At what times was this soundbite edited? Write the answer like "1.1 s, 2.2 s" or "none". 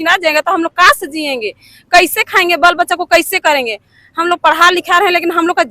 none